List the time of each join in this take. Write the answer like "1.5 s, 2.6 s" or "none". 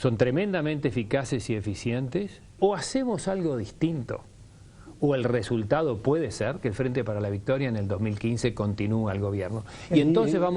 2.4 s

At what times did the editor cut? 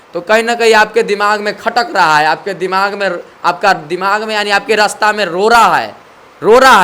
none

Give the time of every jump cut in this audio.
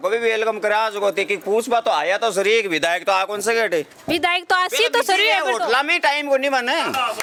none

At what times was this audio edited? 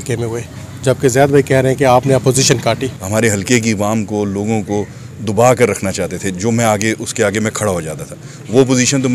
2.9 s

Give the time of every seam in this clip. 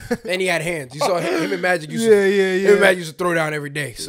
none

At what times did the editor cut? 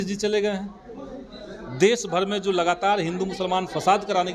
none

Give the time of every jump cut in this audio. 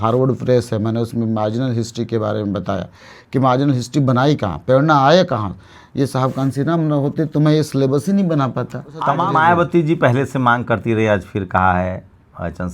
9.2 s

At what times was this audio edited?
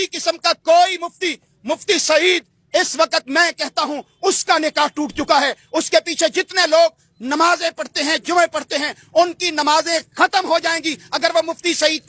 none

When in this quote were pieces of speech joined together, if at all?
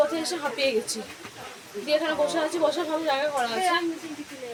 none

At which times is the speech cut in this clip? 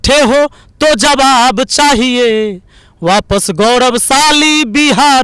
none

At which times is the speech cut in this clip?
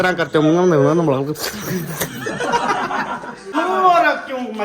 3.5 s

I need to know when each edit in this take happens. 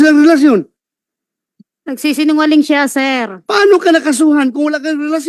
none

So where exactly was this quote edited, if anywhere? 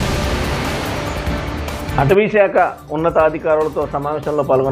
1.9 s

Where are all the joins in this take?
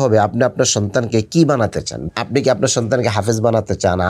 2.0 s

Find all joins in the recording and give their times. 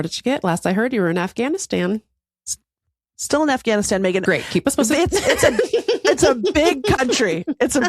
none

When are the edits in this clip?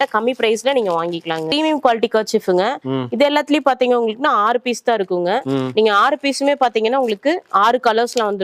1.5 s

